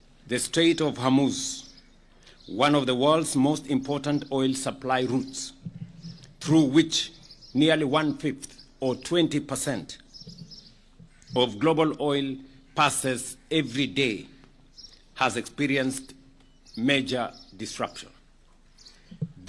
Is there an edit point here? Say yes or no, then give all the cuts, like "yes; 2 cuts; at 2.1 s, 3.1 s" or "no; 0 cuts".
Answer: yes; 1 cut; at 4.6 s